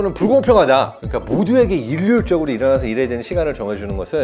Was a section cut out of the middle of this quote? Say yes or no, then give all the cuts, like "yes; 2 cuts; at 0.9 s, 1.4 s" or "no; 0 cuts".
yes; 1 cut; at 1.1 s